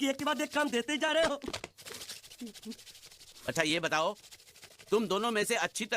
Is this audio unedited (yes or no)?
no